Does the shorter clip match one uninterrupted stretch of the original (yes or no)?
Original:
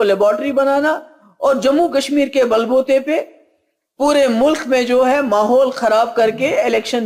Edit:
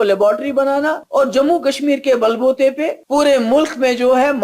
no